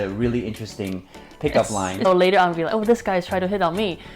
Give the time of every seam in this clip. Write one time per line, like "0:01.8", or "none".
0:02.0